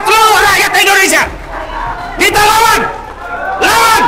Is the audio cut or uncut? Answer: uncut